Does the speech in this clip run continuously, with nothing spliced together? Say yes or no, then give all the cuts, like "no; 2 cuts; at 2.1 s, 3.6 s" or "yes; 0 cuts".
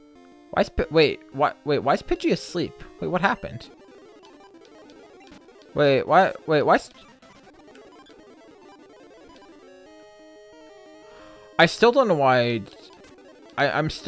yes; 0 cuts